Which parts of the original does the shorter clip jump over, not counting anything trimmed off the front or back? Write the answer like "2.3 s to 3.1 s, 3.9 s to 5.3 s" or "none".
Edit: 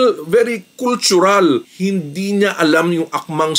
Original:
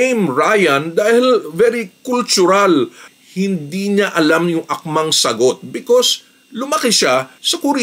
3.0 s to 3.3 s